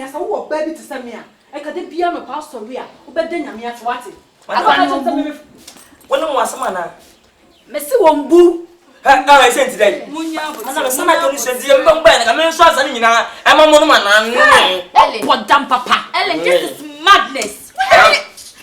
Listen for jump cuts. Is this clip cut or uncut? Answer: uncut